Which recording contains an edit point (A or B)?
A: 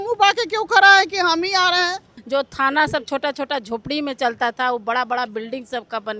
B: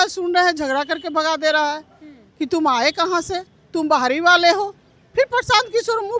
A